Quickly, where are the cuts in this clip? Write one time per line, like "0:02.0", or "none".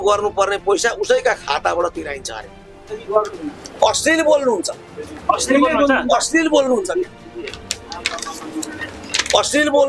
0:02.8